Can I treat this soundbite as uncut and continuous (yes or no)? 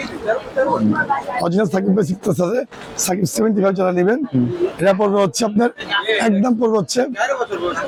yes